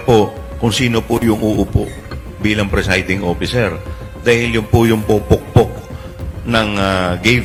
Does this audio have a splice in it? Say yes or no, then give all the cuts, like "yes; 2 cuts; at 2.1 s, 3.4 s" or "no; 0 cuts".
no; 0 cuts